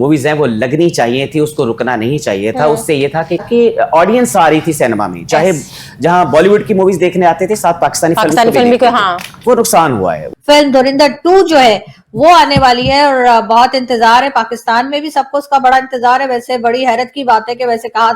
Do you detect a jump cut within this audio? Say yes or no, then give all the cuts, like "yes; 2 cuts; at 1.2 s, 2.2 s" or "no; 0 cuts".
yes; 2 cuts; at 3.4 s, 10.3 s